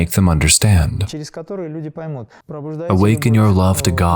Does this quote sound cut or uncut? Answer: cut